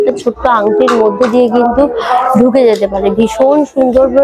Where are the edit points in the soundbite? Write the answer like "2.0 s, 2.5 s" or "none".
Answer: none

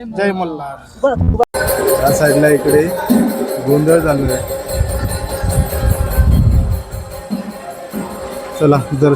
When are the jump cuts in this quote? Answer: 1.4 s

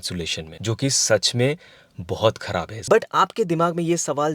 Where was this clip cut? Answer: 2.7 s

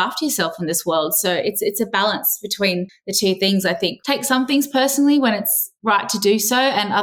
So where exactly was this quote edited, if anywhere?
3.0 s, 4.0 s

